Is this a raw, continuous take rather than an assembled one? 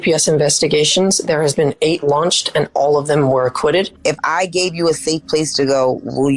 no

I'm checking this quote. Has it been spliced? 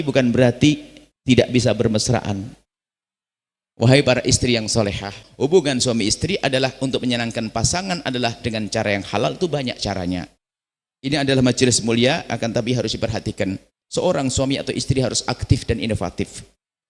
yes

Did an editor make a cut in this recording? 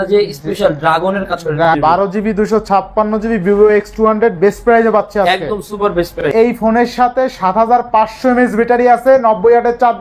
yes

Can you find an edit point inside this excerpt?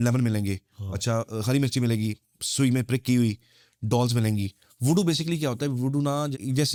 no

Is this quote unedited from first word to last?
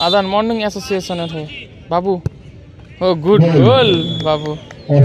yes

